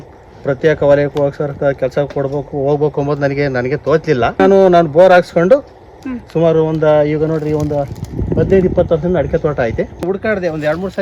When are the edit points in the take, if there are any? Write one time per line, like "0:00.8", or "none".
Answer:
0:04.4
0:10.0